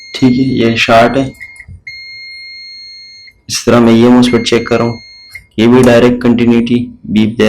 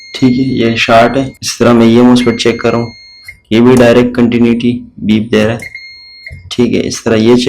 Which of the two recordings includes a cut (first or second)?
second